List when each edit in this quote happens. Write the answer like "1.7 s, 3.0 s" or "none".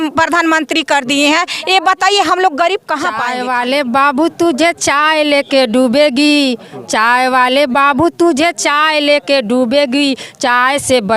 3.1 s